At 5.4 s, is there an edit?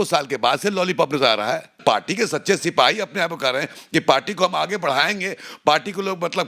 no; 1 cut; at 1.8 s

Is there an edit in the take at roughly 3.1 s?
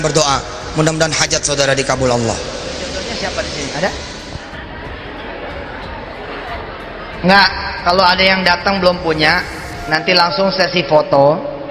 yes; 1 cut; at 3.1 s

